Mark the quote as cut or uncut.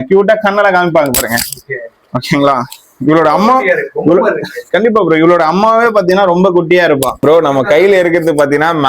cut